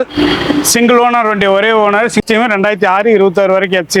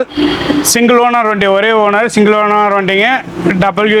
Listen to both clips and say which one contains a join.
first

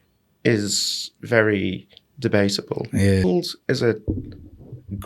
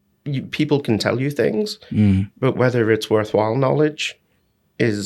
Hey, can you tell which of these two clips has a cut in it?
first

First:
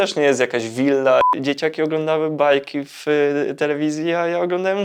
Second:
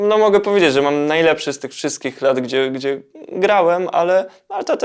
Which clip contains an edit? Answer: first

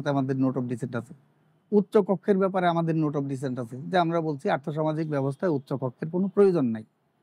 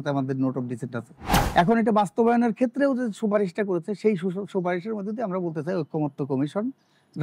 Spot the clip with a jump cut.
second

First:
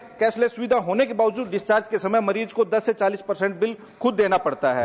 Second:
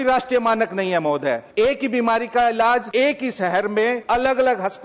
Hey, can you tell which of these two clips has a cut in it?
second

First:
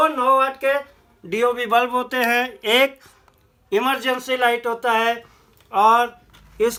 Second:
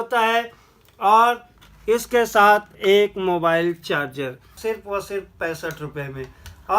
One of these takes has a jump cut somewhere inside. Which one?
second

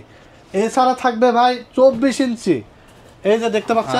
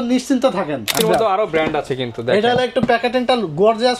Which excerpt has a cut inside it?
second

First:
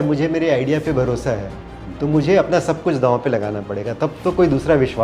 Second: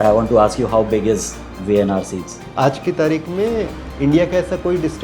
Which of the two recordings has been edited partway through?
second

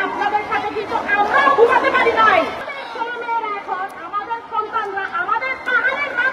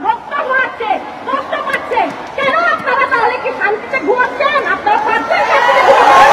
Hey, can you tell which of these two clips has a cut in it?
first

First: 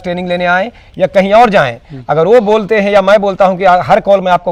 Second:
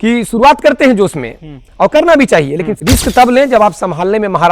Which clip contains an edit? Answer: second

